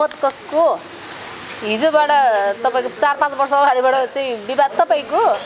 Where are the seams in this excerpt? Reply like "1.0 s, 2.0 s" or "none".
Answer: none